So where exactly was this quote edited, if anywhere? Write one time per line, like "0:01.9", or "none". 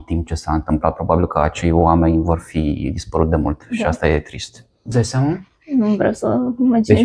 0:04.9